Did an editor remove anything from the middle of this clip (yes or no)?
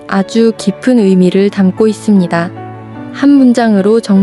no